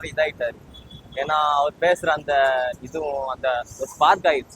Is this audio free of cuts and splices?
yes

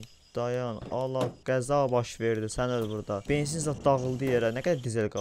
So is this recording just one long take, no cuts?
no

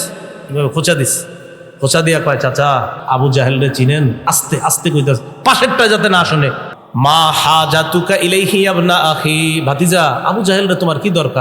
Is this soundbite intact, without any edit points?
no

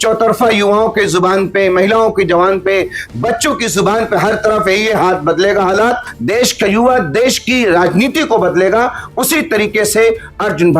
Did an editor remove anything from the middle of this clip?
yes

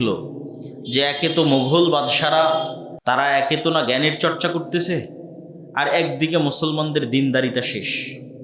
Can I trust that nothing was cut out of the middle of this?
no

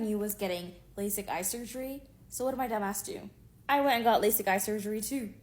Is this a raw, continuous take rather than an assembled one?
yes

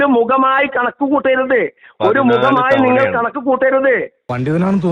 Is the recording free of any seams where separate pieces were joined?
yes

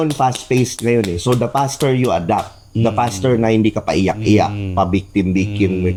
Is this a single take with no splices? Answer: yes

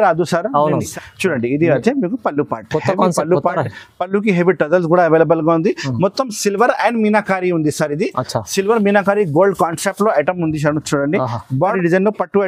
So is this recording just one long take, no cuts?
no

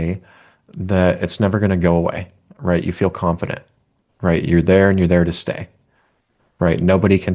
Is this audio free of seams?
yes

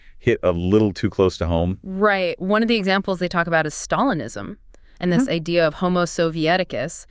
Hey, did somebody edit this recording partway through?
no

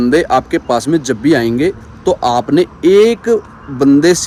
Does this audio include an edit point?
no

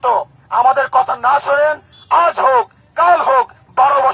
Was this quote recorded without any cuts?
yes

